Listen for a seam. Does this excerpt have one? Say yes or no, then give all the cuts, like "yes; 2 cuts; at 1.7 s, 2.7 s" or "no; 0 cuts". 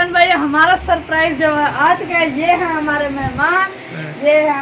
no; 0 cuts